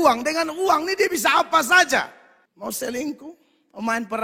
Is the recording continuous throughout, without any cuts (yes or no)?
yes